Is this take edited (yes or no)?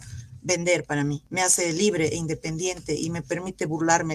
yes